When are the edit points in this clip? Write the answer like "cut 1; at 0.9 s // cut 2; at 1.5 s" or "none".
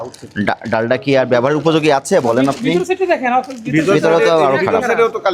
none